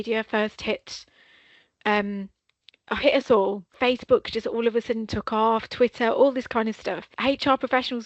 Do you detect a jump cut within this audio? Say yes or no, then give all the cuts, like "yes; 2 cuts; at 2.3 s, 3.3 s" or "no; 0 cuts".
yes; 2 cuts; at 3.7 s, 7.1 s